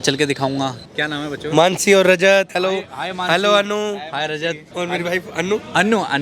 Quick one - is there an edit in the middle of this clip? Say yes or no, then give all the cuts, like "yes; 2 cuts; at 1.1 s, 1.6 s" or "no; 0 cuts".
yes; 3 cuts; at 0.9 s, 2.5 s, 4.6 s